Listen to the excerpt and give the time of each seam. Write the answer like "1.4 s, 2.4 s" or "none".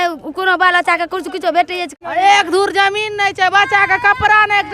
1.8 s

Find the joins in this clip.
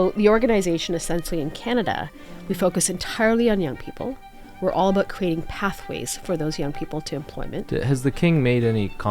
7.7 s

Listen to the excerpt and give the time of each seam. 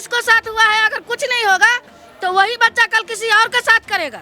none

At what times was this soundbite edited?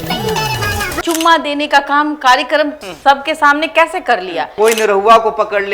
1.0 s, 2.9 s, 4.5 s

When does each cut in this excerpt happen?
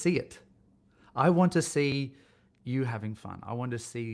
none

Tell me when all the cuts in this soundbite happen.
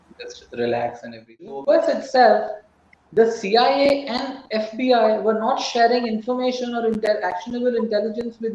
1.6 s

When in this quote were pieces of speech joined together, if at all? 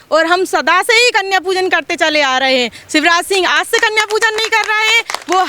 none

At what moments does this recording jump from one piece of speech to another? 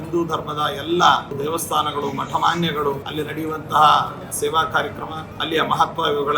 1.4 s, 3.1 s, 4.3 s, 5.3 s

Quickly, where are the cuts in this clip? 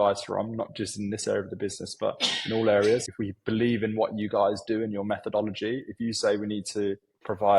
3.1 s

